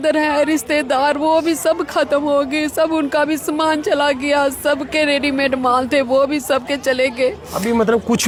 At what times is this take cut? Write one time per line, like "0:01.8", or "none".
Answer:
none